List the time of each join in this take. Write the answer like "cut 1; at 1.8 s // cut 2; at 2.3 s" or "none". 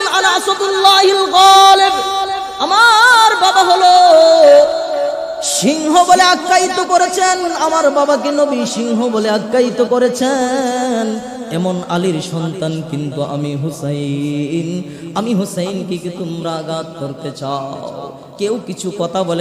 none